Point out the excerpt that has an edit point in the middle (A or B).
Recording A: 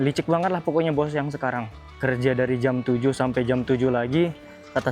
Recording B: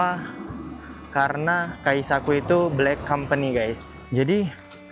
B